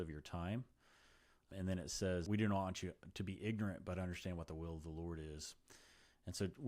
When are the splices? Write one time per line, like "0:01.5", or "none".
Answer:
0:01.5
0:02.2